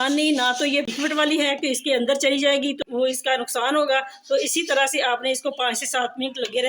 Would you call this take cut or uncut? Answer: cut